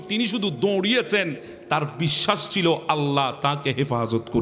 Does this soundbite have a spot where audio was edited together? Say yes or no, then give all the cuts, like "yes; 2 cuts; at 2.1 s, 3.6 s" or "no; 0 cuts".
no; 0 cuts